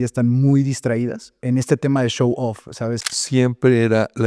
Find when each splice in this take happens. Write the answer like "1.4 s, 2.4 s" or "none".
1.4 s, 3.0 s